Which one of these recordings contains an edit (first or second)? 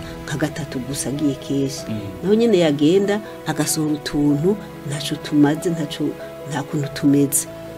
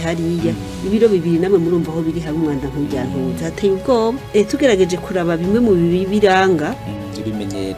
second